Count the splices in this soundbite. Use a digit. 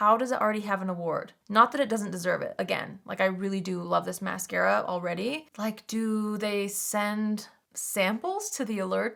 0